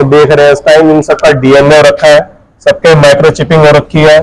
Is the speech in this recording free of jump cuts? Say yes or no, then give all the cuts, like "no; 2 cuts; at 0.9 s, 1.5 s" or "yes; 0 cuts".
yes; 0 cuts